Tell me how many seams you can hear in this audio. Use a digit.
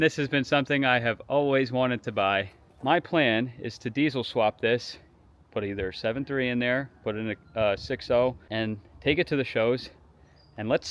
2